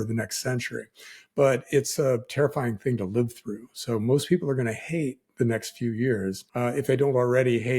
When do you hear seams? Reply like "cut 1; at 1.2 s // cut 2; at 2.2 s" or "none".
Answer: cut 1; at 6.4 s